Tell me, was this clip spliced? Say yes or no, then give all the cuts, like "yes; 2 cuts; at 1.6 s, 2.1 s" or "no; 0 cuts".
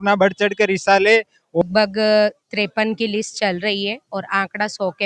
yes; 1 cut; at 1.6 s